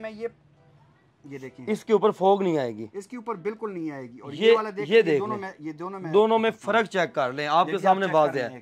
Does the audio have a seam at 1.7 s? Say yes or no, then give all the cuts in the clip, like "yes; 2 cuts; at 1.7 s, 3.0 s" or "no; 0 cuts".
no; 0 cuts